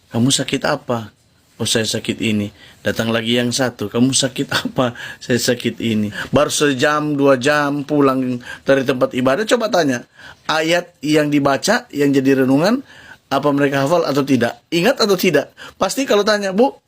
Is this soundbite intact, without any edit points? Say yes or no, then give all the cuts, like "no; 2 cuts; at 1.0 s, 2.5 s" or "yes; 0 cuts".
no; 1 cut; at 6.2 s